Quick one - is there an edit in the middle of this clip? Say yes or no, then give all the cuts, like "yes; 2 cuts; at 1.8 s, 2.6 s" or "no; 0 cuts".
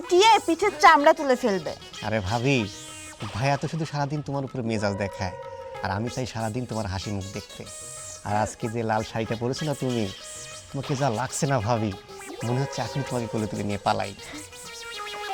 no; 0 cuts